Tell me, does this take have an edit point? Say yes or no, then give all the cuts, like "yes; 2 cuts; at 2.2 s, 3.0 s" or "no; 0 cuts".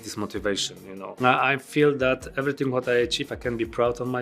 yes; 1 cut; at 1.1 s